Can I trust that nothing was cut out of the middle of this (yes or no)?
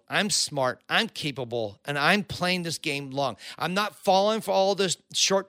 yes